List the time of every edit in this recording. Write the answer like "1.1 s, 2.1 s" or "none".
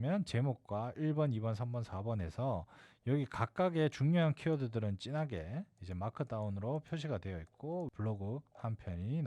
7.9 s